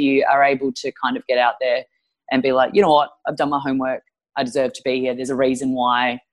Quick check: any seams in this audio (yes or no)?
no